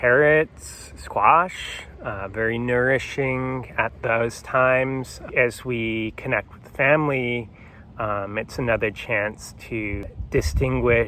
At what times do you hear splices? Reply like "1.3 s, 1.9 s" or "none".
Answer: 4.0 s, 5.2 s, 10.0 s